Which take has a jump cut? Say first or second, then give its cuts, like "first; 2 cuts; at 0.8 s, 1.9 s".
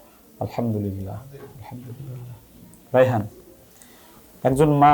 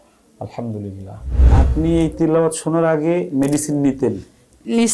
second; 1 cut; at 1.5 s